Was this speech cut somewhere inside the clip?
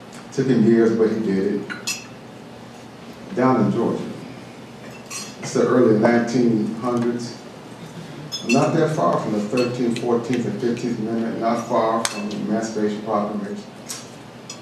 yes; 1 cut; at 13.6 s

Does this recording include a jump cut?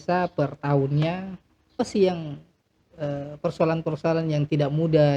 yes; 1 cut; at 1.7 s

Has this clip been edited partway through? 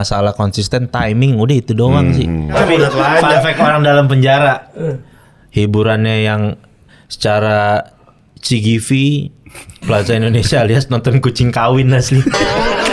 yes; 1 cut; at 2.6 s

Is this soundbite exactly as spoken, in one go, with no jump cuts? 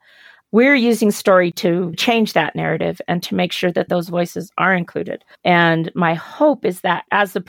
no; 3 cuts; at 2.0 s, 3.9 s, 5.2 s

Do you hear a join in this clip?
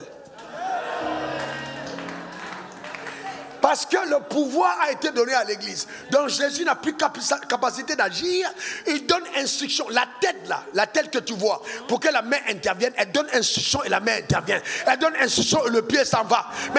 no; 0 cuts

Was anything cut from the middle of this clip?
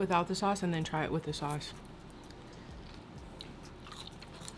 no; 0 cuts

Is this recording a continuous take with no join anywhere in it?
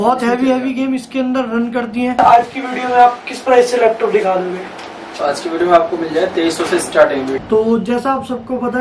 no; 2 cuts; at 2.2 s, 7.4 s

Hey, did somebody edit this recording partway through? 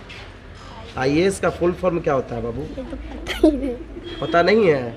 no; 0 cuts

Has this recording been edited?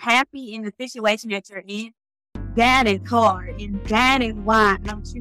no; 0 cuts

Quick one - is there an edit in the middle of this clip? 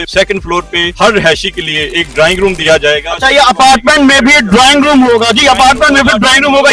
no; 0 cuts

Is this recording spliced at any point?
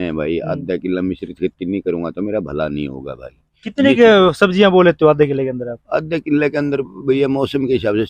no; 0 cuts

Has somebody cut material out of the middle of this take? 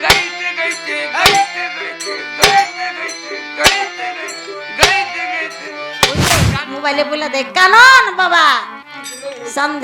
yes; 1 cut; at 6.5 s

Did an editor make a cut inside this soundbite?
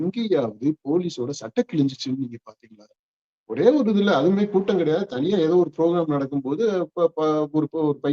no; 0 cuts

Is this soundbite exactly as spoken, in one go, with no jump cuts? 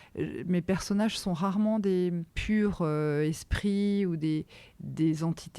no; 1 cut; at 2.3 s

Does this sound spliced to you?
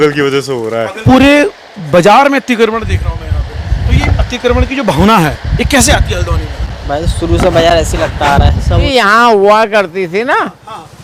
yes; 2 cuts; at 1.0 s, 8.8 s

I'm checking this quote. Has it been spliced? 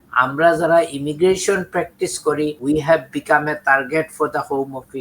yes; 1 cut; at 2.6 s

